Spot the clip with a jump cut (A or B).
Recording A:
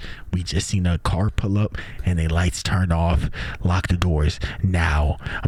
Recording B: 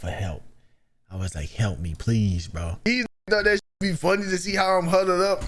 B